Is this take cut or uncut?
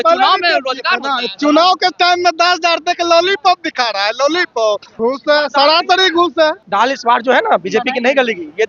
cut